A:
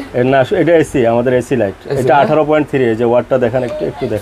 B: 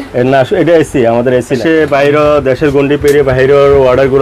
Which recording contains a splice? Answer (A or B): B